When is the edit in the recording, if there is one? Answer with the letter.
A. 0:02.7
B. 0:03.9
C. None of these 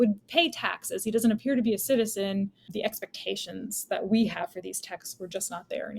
A